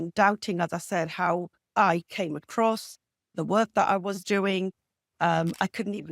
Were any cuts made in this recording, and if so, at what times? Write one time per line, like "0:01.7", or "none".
0:01.6